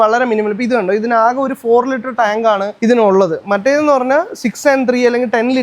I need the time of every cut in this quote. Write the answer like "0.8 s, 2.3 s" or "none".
none